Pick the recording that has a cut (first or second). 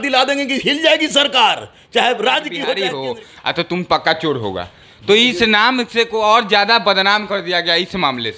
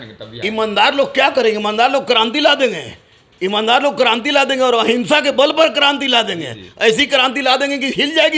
first